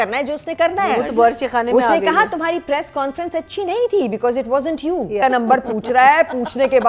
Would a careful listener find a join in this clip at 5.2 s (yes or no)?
yes